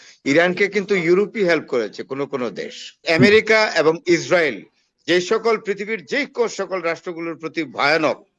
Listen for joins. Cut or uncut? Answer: cut